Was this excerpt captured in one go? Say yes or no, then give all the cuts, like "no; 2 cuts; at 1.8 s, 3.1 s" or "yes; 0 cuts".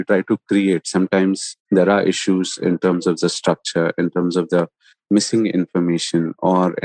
no; 1 cut; at 1.5 s